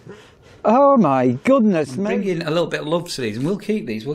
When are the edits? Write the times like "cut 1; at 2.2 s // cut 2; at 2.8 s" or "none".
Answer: cut 1; at 1.9 s